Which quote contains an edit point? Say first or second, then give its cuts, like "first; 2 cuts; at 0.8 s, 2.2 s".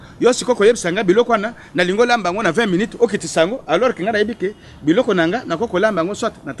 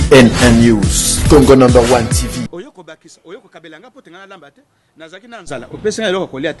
second; 1 cut; at 2.5 s